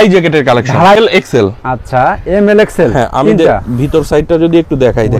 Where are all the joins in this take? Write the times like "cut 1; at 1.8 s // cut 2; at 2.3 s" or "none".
cut 1; at 1.0 s